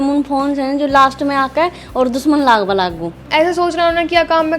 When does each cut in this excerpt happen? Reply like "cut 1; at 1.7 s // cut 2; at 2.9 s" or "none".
cut 1; at 3.2 s